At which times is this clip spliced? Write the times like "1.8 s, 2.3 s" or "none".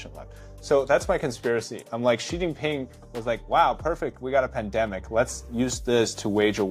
none